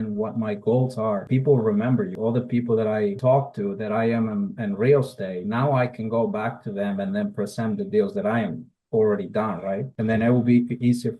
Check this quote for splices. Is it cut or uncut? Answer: cut